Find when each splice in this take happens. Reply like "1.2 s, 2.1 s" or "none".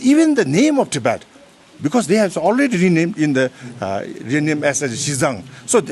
none